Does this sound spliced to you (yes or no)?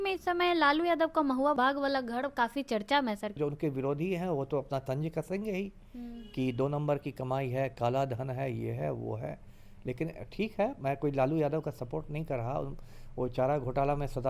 yes